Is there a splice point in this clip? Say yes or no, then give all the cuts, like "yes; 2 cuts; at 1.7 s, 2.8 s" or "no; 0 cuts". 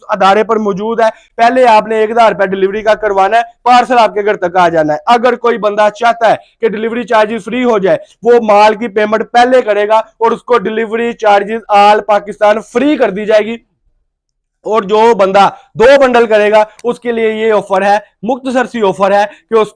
no; 0 cuts